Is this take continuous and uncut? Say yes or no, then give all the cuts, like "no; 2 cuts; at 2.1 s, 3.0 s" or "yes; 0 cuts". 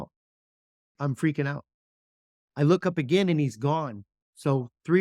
no; 1 cut; at 1.0 s